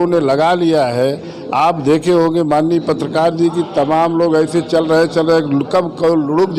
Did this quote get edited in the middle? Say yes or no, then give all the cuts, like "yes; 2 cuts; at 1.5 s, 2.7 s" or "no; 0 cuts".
no; 0 cuts